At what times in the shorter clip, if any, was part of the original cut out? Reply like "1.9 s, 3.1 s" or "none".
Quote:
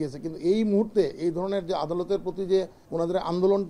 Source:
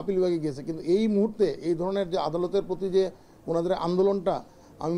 2.8 s